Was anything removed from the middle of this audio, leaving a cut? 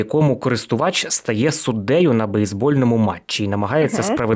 no; 0 cuts

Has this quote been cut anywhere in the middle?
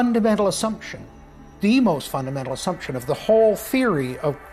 no; 0 cuts

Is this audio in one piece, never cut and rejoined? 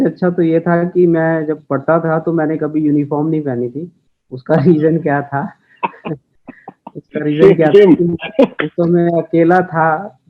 yes; 0 cuts

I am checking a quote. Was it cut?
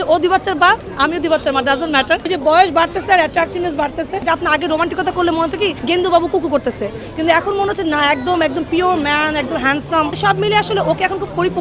yes; 4 cuts; at 2.2 s, 4.2 s, 5.8 s, 10.1 s

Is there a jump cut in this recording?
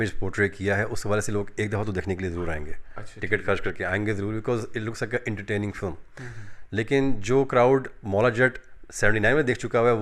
no; 0 cuts

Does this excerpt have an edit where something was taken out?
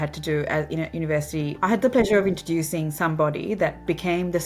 yes; 1 cut; at 1.5 s

